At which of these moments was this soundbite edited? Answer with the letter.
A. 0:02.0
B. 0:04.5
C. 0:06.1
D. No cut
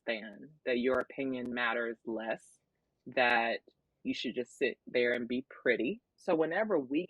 C